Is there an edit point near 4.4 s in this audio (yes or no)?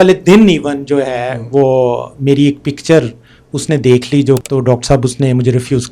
yes